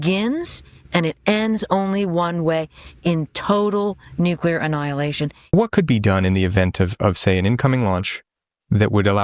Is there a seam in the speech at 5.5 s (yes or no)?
yes